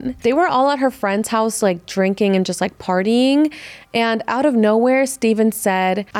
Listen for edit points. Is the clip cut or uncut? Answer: uncut